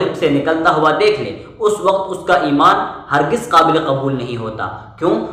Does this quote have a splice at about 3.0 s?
no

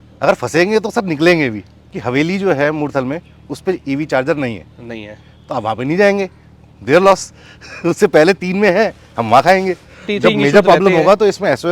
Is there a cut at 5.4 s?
no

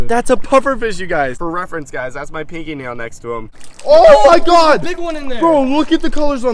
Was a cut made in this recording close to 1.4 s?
yes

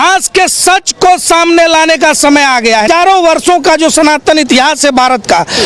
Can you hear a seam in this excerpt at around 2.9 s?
yes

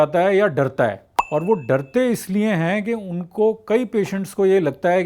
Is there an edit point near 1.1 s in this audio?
yes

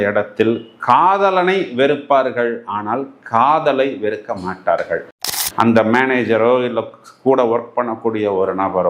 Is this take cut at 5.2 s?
yes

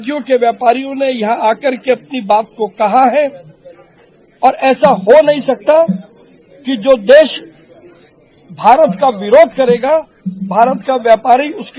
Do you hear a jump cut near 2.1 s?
no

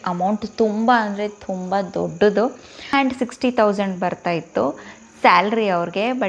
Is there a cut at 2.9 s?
yes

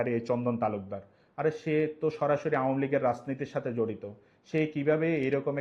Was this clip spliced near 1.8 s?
no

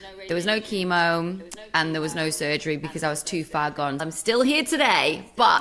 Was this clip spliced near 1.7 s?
no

